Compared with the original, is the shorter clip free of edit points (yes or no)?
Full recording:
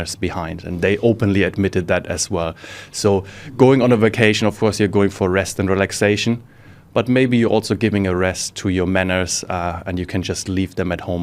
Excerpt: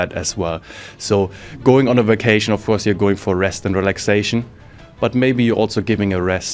yes